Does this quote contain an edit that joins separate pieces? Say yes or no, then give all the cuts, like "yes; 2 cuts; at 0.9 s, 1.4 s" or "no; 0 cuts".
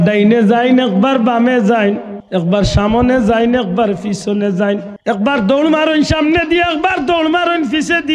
yes; 2 cuts; at 2.1 s, 4.9 s